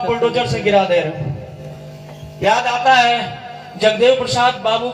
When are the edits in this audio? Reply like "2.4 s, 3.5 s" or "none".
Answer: none